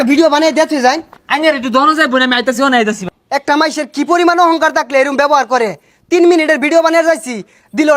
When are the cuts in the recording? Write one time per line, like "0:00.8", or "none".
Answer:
0:03.0